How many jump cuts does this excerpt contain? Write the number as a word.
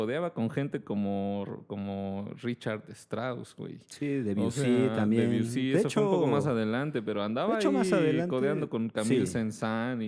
zero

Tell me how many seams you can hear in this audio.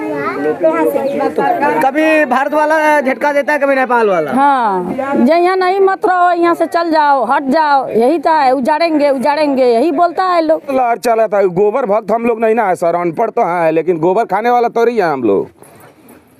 one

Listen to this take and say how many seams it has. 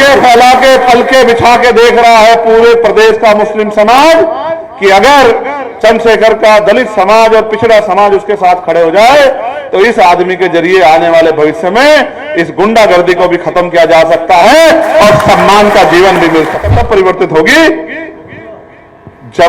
one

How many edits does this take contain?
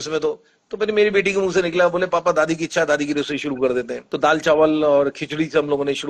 one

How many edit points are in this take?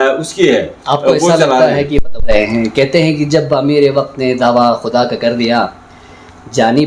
one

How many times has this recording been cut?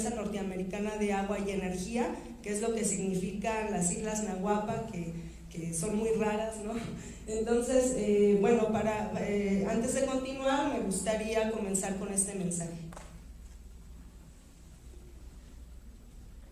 zero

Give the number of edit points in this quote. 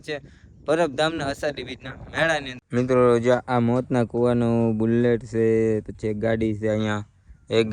one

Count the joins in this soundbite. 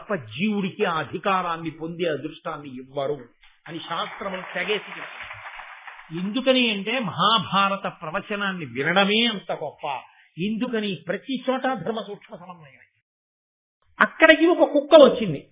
one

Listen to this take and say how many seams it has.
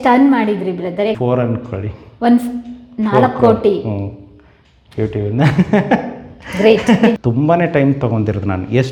two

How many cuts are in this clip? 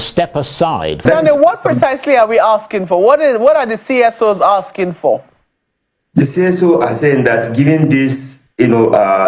one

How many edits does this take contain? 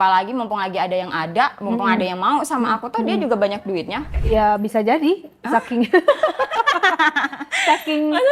one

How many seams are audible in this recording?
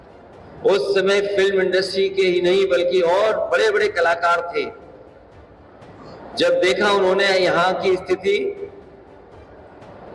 zero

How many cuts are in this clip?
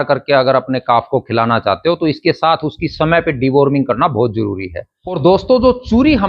one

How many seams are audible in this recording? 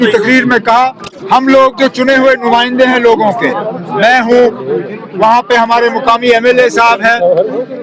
one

